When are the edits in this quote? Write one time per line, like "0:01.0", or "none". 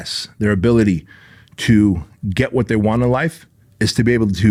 none